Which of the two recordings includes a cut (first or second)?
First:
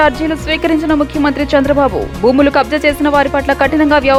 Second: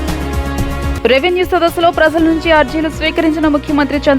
second